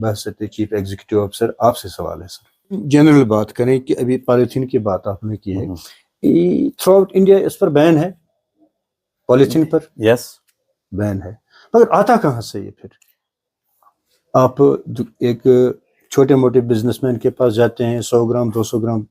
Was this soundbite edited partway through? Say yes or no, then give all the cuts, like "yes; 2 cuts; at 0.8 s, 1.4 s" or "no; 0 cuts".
yes; 1 cut; at 2.8 s